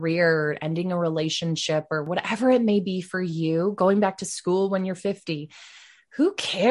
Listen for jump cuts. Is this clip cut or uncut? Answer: cut